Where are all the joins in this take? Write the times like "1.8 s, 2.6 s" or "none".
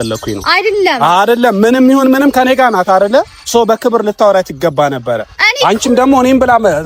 none